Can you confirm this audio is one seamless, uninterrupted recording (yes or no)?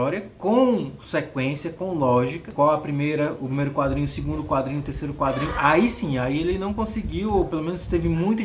no